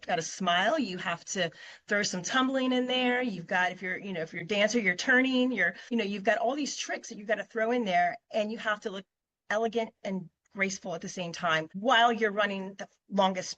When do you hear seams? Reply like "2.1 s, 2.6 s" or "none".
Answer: 5.7 s, 11.7 s